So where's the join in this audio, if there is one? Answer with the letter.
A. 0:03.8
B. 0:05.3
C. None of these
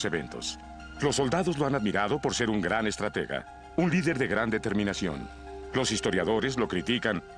B